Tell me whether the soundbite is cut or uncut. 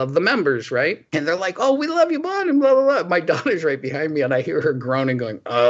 cut